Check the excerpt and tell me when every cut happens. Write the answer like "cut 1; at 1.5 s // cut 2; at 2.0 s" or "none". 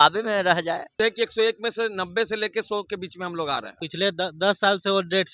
cut 1; at 0.9 s // cut 2; at 3.8 s